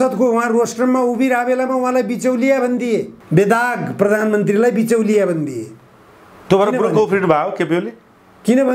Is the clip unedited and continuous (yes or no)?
yes